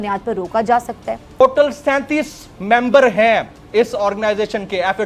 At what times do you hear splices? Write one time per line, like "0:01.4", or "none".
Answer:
0:01.4